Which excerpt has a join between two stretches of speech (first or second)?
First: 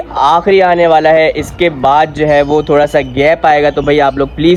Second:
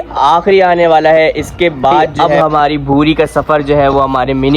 second